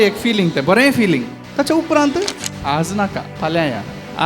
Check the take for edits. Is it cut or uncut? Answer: cut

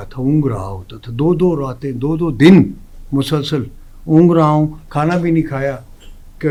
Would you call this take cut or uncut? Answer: uncut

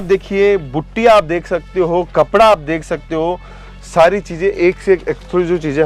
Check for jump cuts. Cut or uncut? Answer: uncut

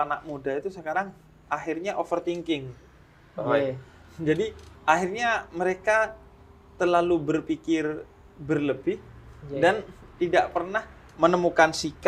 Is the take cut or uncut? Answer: uncut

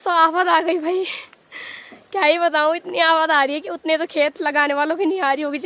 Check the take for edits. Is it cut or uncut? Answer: uncut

